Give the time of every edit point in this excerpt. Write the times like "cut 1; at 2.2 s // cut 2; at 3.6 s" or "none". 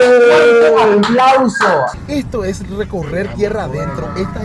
cut 1; at 1.9 s